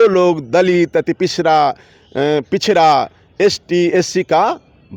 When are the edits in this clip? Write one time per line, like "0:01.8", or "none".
none